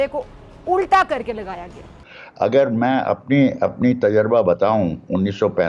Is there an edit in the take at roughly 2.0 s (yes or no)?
yes